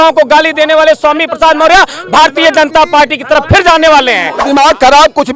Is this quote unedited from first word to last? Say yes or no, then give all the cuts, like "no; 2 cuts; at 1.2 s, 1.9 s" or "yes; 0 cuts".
no; 1 cut; at 4.3 s